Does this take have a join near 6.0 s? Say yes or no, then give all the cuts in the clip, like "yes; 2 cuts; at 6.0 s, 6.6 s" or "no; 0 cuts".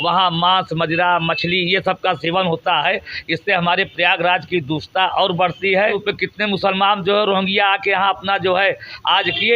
yes; 1 cut; at 6.0 s